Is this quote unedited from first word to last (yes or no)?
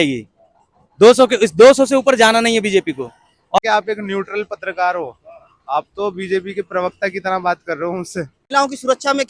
no